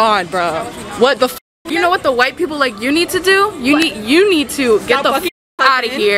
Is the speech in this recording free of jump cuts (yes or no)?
no